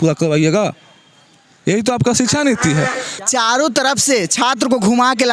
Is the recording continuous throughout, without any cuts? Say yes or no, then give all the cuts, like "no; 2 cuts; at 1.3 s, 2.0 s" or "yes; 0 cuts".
no; 1 cut; at 3.1 s